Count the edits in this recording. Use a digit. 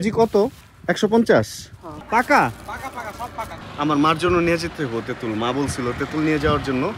2